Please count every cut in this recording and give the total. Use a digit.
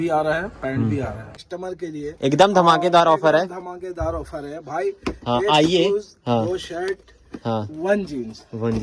1